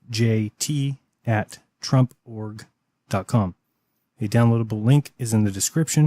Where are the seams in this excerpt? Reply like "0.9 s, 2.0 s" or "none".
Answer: 4.8 s